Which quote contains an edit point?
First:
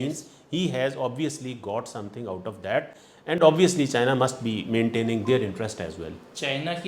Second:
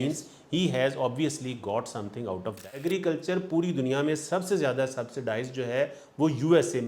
second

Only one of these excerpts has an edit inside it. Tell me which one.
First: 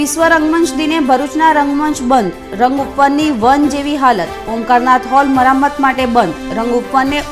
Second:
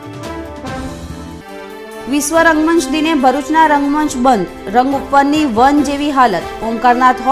second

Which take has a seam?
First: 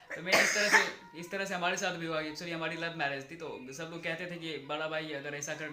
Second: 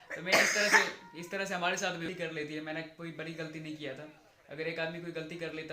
second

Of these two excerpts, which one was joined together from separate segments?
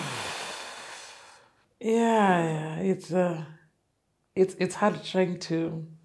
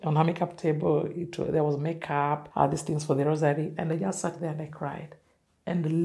second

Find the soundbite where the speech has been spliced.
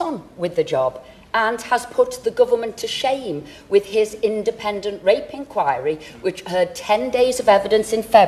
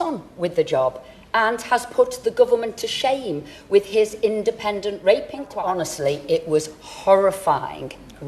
second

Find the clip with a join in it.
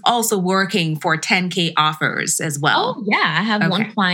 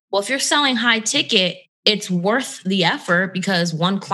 second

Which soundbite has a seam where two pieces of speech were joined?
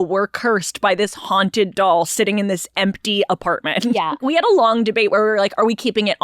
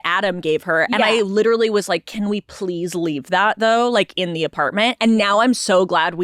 first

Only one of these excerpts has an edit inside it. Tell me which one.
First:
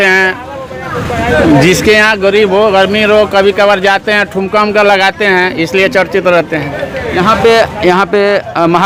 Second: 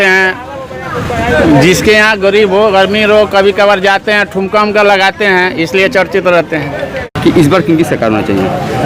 second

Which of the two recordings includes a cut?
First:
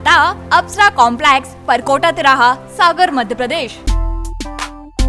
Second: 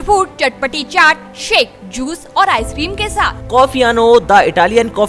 first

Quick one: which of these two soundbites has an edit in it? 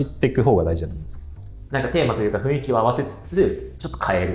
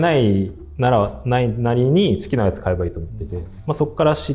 first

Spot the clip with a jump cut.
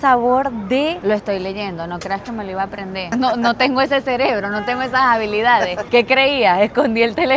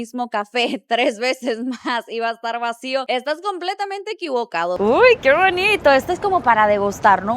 second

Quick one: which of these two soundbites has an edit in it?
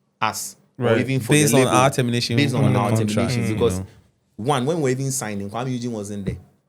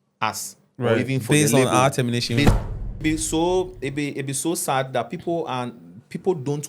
second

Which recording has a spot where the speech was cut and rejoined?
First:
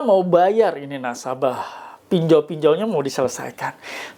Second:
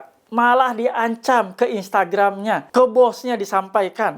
second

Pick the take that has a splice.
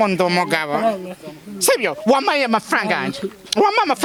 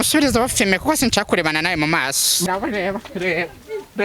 second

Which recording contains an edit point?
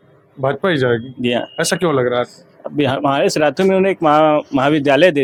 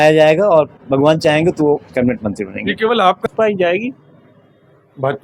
second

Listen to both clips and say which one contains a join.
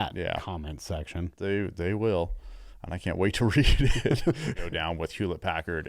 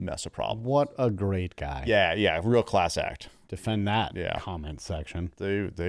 first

